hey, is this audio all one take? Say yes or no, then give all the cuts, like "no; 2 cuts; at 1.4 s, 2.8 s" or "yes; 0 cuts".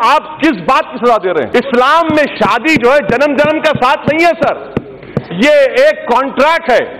no; 1 cut; at 1.5 s